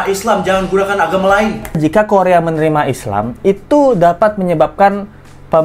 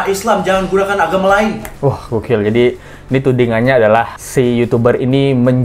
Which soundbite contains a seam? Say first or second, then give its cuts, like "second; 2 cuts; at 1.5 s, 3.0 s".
first; 1 cut; at 1.8 s